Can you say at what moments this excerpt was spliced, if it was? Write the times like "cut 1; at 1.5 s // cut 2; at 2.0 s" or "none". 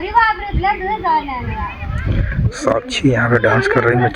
none